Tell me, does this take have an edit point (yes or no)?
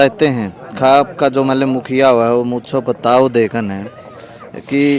no